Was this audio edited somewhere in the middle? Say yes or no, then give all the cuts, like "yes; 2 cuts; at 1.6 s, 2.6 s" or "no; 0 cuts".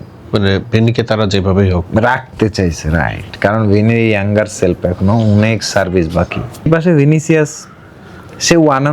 yes; 1 cut; at 6.7 s